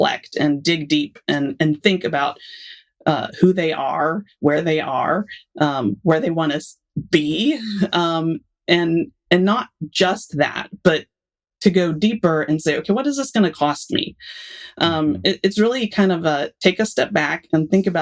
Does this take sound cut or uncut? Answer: uncut